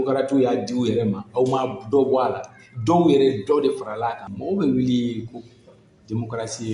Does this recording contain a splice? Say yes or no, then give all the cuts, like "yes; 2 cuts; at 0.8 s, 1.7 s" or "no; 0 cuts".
yes; 1 cut; at 4.3 s